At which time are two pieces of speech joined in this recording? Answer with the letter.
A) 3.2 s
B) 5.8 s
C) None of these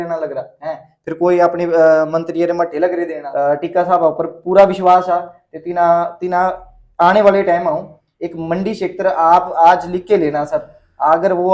A